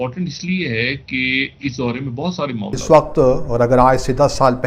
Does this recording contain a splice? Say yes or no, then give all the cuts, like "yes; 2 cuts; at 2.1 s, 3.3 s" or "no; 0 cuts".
yes; 1 cut; at 2.8 s